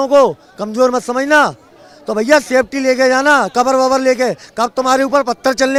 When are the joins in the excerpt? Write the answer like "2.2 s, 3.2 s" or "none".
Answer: none